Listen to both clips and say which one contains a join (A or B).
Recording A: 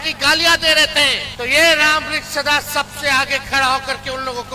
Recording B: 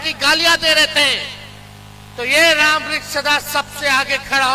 A